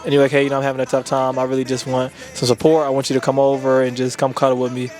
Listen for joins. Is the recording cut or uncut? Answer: uncut